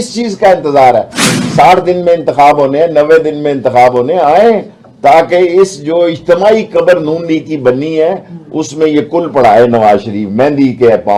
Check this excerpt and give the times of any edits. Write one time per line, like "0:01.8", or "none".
none